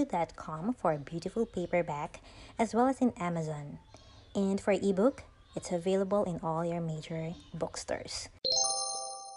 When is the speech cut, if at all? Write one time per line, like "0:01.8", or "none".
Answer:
0:08.2

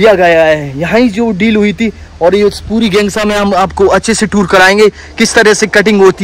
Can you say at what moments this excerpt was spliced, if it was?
none

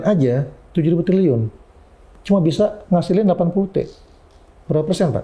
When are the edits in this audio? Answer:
none

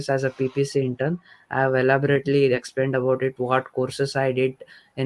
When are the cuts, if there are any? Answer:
none

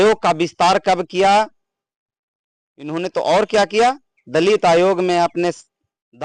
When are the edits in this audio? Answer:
none

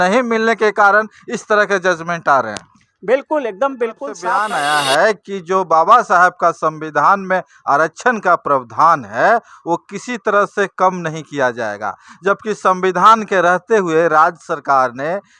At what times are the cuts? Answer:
0:04.1

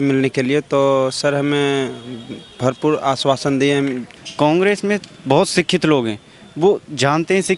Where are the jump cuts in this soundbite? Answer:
0:04.1

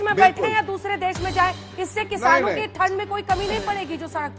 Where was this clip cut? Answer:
none

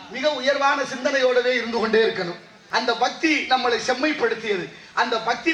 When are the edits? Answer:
0:02.5

